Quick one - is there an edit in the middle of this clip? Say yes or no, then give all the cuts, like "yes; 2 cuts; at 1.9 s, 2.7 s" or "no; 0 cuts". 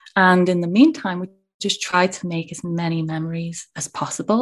no; 0 cuts